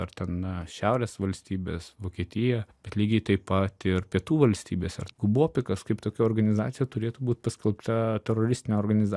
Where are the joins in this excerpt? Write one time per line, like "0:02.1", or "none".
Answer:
0:02.8
0:05.0